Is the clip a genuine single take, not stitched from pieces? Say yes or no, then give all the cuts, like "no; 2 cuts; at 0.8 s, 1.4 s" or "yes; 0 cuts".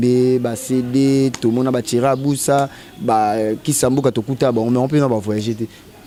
yes; 0 cuts